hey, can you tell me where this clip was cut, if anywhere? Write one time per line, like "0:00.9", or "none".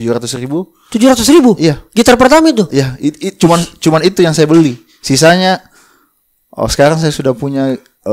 none

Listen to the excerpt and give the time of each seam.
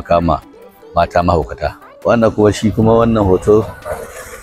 0:01.8

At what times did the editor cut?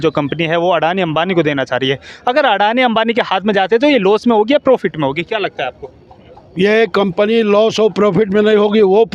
none

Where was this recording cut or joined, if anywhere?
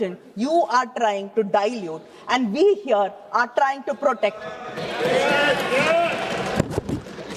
none

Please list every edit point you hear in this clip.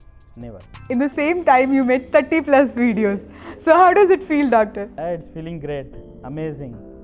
0:00.9
0:04.9

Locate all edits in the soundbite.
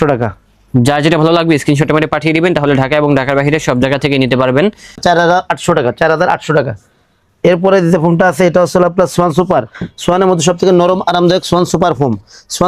0:05.0

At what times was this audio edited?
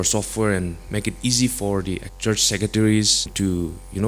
0:02.1
0:03.3

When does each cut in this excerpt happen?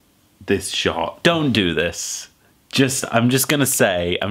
0:01.1

